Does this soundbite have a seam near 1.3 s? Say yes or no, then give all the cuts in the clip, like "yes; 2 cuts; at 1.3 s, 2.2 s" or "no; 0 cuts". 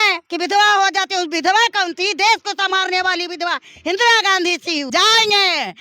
no; 1 cut; at 4.9 s